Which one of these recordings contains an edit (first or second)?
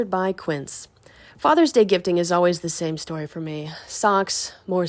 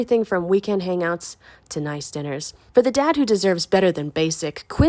second